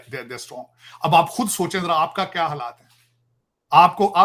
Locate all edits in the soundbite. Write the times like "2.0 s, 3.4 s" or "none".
none